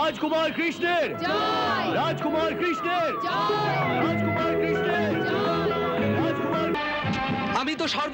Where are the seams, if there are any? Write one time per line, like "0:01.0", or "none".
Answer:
0:06.8